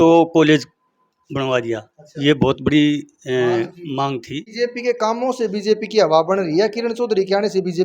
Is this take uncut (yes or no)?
no